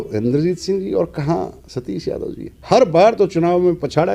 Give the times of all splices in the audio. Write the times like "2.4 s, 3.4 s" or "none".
none